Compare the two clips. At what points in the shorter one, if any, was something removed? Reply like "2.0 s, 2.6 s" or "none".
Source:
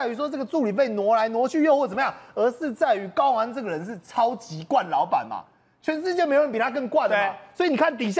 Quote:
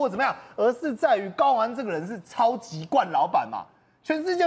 none